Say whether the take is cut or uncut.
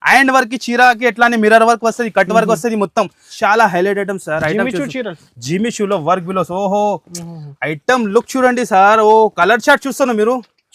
cut